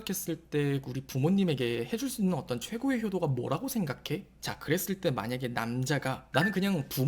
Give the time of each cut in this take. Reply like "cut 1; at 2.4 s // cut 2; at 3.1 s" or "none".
cut 1; at 4.3 s